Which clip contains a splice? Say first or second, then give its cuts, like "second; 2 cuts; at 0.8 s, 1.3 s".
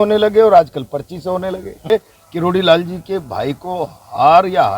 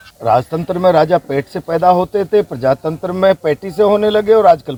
first; 1 cut; at 1.9 s